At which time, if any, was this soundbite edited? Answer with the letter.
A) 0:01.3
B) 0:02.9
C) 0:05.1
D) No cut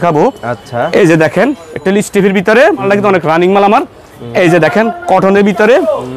B